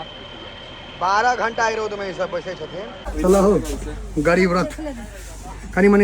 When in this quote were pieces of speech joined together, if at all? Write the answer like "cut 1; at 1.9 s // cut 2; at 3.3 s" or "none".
cut 1; at 3.0 s